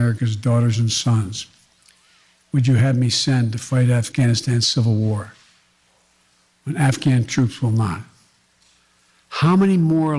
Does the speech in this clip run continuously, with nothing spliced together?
no; 1 cut; at 4.1 s

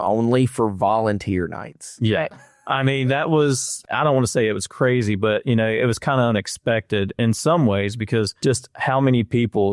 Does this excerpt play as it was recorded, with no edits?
no; 3 cuts; at 3.7 s, 7.1 s, 8.3 s

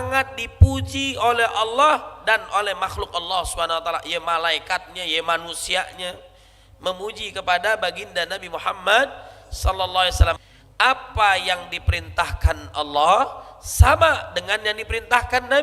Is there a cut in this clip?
yes; 1 cut; at 10.4 s

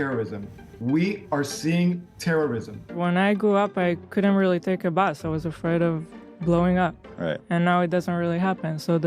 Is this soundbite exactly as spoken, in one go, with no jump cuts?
no; 1 cut; at 2.9 s

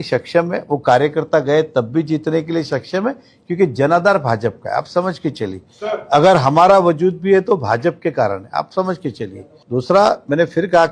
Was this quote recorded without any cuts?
yes; 0 cuts

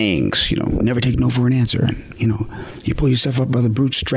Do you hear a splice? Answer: yes; 1 cut; at 2.1 s

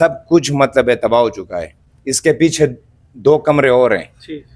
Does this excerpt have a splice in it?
no; 0 cuts

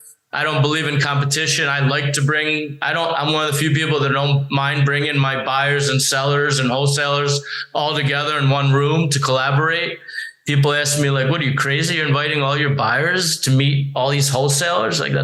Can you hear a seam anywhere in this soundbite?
no; 0 cuts

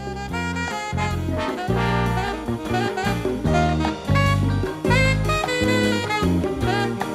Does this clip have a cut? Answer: no; 0 cuts

